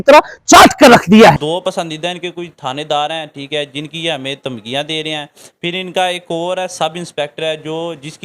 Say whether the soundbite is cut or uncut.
cut